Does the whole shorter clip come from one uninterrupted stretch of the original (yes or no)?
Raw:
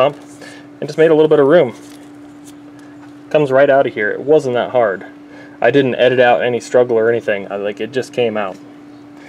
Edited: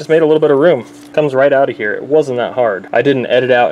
no